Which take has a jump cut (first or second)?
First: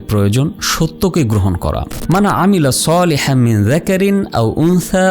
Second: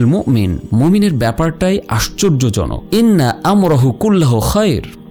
first